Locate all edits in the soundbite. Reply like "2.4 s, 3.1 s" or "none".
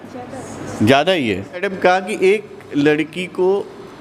1.7 s